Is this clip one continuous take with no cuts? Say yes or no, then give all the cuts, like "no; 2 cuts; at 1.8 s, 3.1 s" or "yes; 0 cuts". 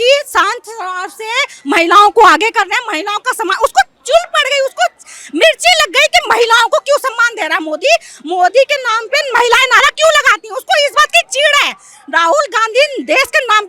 yes; 0 cuts